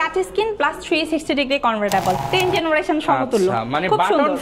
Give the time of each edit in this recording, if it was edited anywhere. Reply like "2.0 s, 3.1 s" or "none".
2.2 s

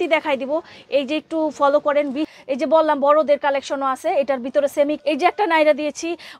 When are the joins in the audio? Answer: 2.3 s, 5.0 s

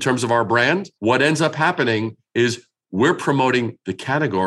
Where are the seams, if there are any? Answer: 0.9 s

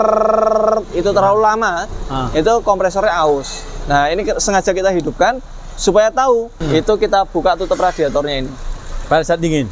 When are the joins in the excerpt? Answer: 6.6 s

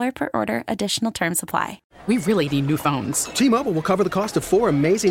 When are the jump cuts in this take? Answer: 1.8 s

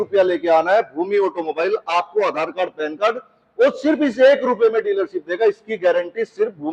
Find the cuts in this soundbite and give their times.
none

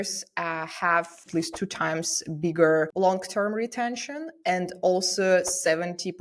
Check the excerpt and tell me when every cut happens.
1.2 s, 2.9 s

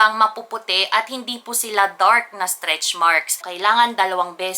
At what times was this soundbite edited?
3.4 s

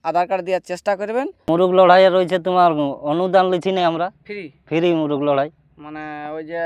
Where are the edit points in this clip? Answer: 1.5 s

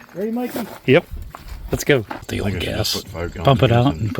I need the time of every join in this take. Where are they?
2.3 s

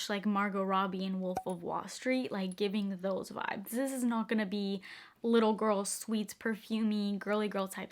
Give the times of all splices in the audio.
none

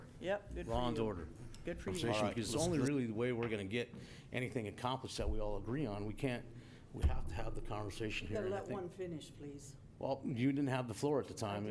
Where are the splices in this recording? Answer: 2.3 s

